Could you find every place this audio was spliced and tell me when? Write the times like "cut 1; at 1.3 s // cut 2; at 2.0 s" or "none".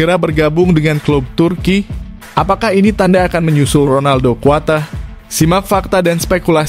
none